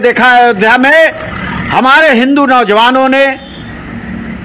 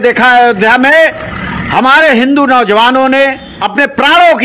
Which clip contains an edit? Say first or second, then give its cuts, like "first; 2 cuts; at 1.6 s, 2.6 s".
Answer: second; 1 cut; at 3.5 s